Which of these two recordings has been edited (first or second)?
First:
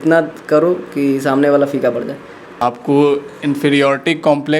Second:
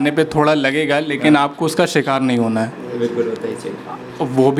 first